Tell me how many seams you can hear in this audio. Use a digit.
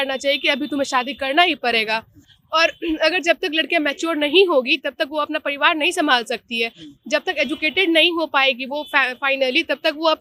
0